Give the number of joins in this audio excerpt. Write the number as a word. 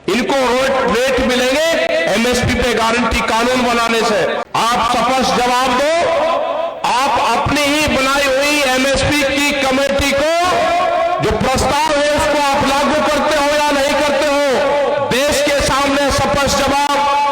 one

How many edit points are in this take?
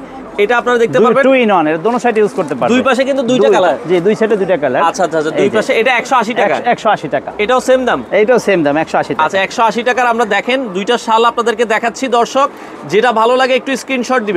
zero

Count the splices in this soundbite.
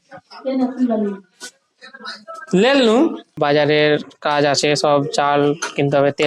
one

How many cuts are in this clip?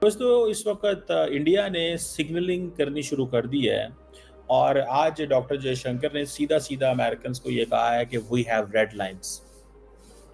zero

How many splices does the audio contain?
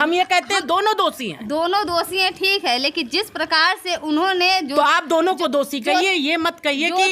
zero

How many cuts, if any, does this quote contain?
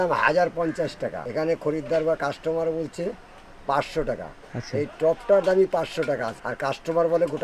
two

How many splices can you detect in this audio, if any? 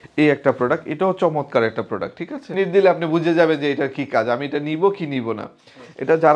one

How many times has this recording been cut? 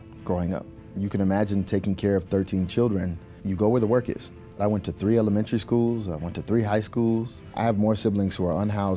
three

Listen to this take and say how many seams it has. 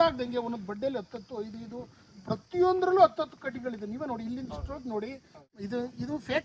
one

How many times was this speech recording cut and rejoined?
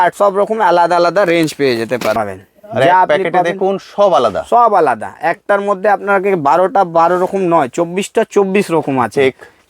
one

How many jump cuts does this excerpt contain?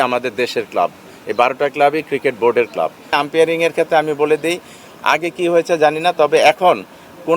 one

